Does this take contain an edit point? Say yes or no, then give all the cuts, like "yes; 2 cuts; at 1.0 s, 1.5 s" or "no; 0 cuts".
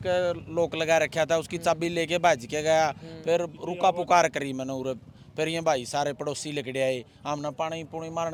no; 0 cuts